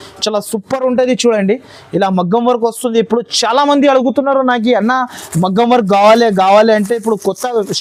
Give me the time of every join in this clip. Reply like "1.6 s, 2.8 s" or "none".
none